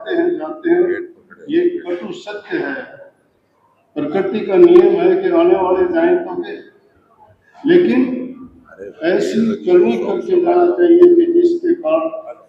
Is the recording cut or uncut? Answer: uncut